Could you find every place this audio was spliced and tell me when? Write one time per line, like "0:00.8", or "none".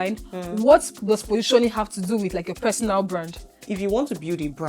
0:03.6